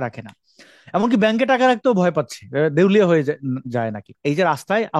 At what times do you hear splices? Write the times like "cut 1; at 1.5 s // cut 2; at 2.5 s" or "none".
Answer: cut 1; at 4.1 s